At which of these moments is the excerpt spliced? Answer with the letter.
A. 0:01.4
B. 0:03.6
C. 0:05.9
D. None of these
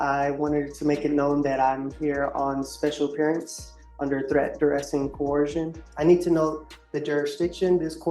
C